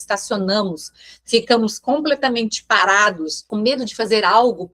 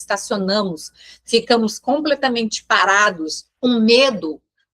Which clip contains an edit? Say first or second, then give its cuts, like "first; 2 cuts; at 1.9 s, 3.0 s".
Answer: first; 1 cut; at 3.4 s